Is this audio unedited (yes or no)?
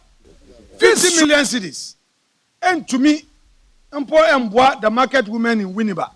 no